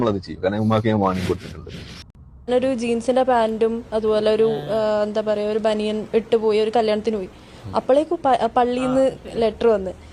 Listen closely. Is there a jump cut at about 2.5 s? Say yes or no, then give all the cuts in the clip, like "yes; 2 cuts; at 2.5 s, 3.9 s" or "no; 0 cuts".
yes; 1 cut; at 2.5 s